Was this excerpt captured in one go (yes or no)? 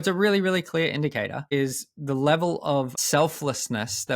no